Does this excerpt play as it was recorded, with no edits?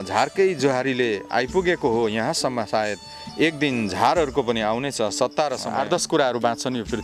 no; 1 cut; at 5.6 s

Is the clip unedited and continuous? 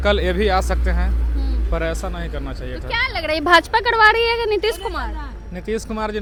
yes; 0 cuts

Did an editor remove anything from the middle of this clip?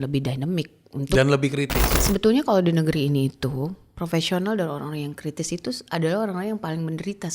yes; 1 cut; at 1.9 s

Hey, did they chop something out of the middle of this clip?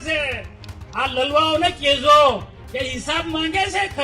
yes; 1 cut; at 2.6 s

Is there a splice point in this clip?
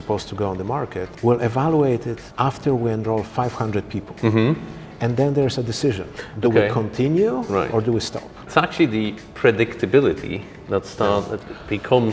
yes; 3 cuts; at 1.1 s, 2.2 s, 8.4 s

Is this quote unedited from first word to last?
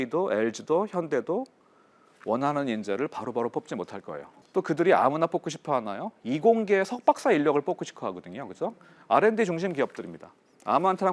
yes; 0 cuts

